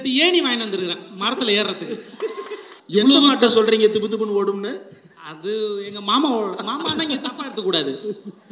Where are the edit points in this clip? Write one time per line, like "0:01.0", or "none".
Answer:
0:02.7